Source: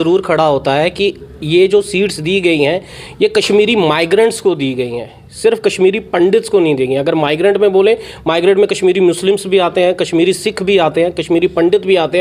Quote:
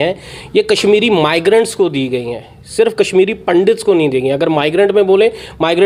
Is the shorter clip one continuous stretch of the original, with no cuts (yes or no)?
yes